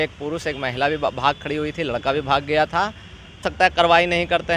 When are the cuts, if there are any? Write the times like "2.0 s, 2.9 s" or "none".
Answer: 3.4 s